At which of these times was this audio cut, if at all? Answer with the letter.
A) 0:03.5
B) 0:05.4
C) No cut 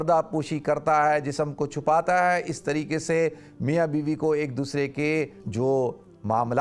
B